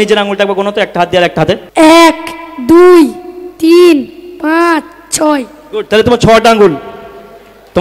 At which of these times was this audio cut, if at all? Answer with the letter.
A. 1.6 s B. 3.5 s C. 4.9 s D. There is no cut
A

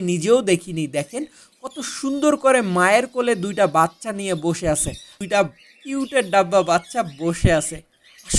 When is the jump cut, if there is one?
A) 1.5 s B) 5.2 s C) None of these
B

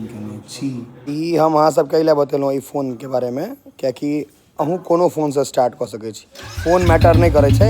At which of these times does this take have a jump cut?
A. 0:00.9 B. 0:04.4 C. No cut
A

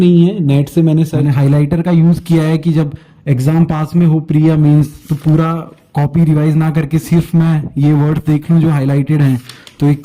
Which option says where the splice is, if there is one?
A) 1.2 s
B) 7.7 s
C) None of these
A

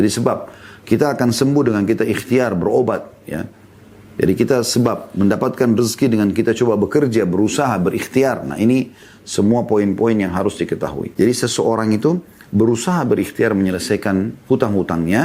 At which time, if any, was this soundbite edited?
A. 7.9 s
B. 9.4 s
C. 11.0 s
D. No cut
C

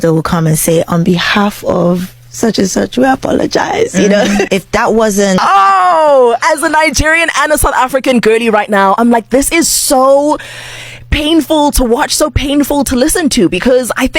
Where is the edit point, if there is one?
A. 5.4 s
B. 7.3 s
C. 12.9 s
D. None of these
A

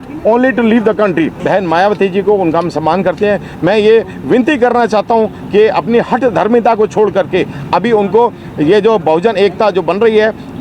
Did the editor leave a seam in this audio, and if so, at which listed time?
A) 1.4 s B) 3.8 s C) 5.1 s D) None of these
A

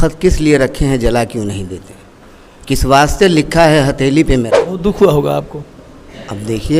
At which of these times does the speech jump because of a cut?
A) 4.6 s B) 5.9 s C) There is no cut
A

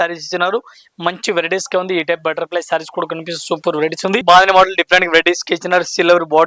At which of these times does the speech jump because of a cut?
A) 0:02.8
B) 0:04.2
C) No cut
B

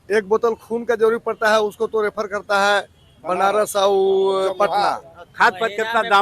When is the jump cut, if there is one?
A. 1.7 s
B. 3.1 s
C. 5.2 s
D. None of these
C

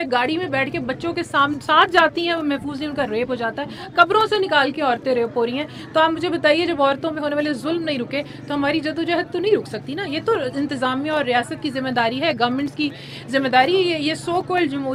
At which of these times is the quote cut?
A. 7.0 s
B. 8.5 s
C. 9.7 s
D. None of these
D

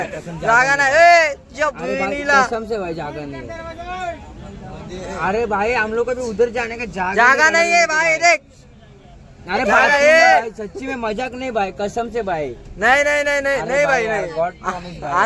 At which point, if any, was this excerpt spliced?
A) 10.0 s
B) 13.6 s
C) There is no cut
C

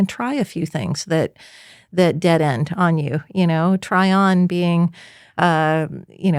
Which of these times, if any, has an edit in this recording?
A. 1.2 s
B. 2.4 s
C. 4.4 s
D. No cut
D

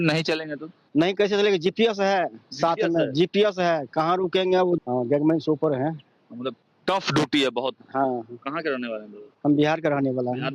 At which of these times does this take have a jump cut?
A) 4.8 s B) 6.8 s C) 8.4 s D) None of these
A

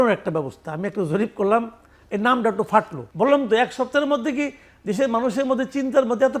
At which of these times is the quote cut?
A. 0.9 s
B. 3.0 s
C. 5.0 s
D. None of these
B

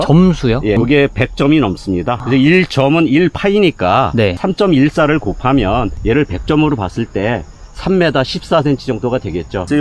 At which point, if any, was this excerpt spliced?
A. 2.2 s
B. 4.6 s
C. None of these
C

